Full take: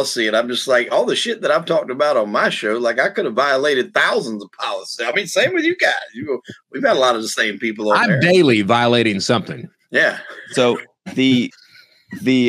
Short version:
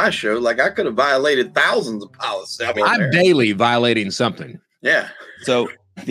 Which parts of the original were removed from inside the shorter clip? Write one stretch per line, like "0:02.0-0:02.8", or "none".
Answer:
0:05.1-0:07.8

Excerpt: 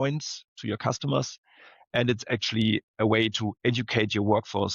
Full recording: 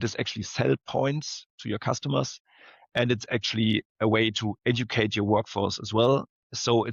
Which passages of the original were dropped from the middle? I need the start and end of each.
none

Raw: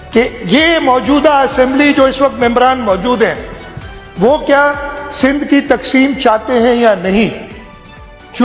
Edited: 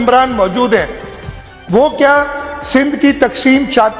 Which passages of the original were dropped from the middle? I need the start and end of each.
none

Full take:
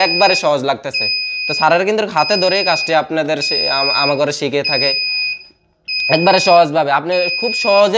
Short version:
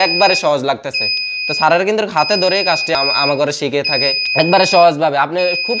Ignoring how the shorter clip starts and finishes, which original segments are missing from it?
0:02.9-0:03.7
0:05.0-0:06.0

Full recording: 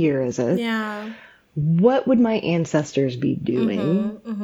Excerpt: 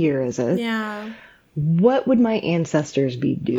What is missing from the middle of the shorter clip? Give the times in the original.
none

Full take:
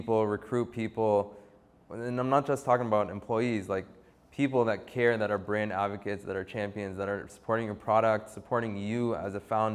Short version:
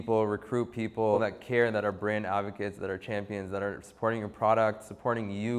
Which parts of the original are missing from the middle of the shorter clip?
0:01.2-0:04.6

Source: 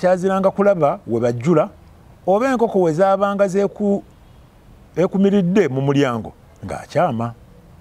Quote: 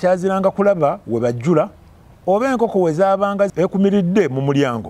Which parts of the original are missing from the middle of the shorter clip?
0:03.5-0:04.9

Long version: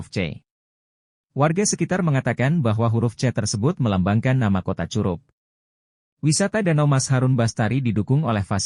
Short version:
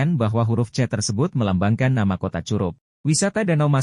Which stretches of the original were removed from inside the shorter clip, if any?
0:05.3-0:06.1

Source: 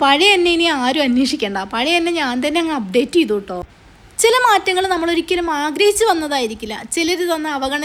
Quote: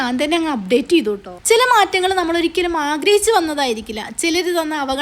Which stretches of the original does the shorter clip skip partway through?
0:03.5-0:04.0

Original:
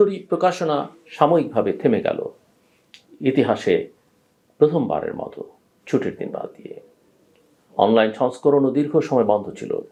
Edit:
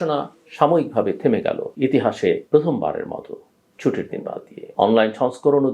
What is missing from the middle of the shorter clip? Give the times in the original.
0:02.3-0:03.1
0:03.9-0:04.5
0:06.6-0:07.6

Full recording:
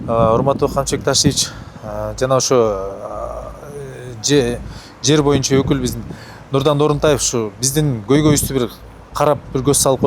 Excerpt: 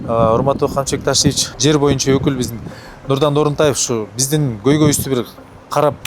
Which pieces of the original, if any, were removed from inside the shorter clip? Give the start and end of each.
0:01.5-0:04.9

